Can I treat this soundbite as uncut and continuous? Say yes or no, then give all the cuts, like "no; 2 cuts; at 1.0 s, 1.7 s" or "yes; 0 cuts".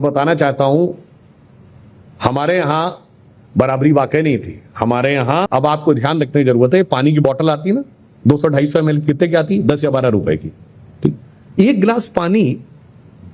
no; 1 cut; at 5.4 s